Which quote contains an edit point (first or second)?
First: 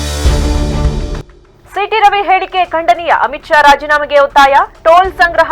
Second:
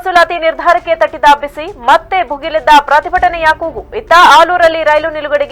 first